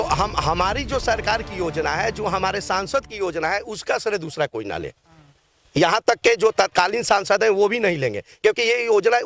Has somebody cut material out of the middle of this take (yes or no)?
no